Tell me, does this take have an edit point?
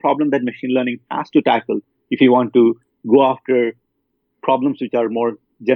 no; 0 cuts

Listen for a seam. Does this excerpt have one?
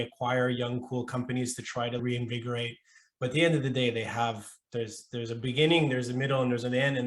no; 0 cuts

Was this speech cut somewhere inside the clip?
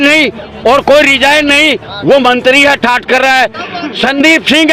no; 0 cuts

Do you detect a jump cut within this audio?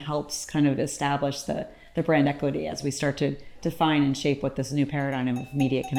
no; 0 cuts

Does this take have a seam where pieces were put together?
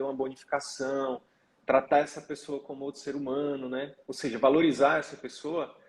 yes; 1 cut; at 4.0 s

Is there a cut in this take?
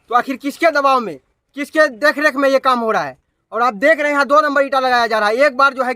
no; 0 cuts

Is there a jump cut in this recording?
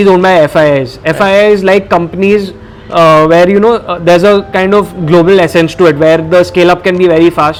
no; 0 cuts

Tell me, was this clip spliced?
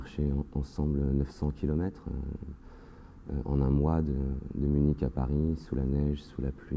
no; 0 cuts

